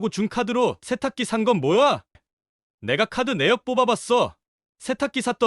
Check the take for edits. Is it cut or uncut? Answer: cut